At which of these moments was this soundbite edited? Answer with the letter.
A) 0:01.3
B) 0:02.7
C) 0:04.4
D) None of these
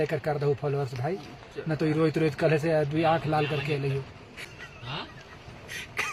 C